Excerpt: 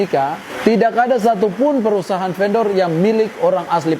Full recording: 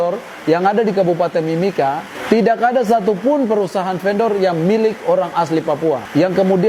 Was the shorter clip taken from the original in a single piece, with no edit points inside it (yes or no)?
yes